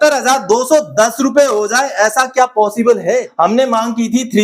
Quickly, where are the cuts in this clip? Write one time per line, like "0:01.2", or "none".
0:03.3

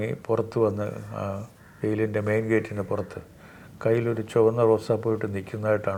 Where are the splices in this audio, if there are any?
none

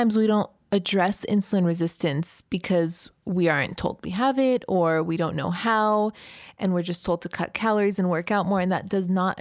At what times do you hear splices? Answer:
none

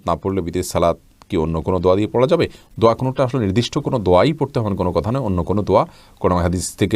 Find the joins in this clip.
none

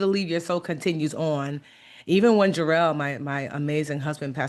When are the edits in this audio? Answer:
none

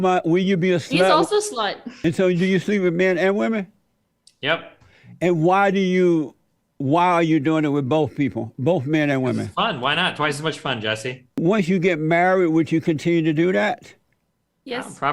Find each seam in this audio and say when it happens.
0:01.8
0:11.2

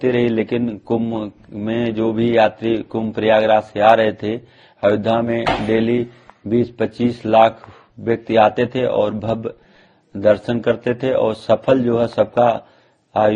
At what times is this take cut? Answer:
none

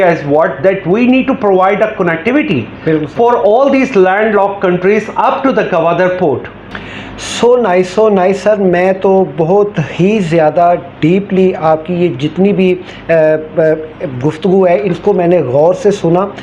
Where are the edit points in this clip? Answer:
none

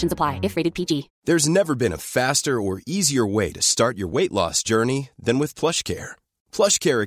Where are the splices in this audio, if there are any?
0:01.1

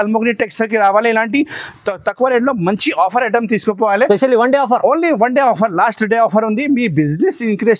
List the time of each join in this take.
none

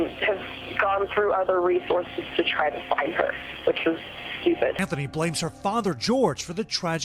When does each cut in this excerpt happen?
0:04.8

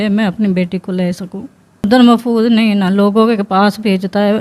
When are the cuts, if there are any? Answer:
0:01.8

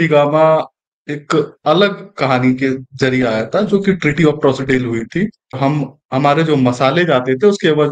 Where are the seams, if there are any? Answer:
0:05.6

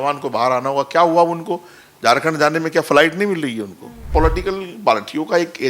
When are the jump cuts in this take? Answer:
0:04.1

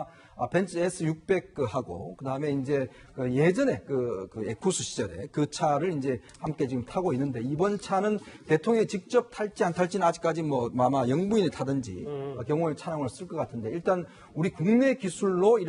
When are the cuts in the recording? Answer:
0:12.9

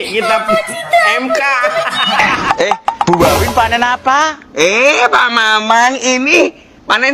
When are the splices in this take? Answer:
0:02.3

